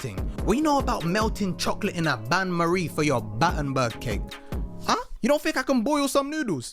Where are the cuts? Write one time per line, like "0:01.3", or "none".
0:05.1